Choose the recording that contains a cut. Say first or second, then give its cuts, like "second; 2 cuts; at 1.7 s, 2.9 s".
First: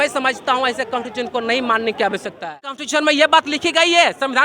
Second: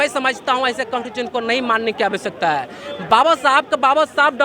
first; 1 cut; at 2.8 s